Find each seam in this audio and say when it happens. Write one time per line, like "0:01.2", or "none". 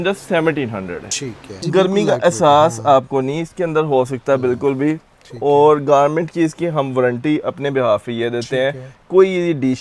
0:01.6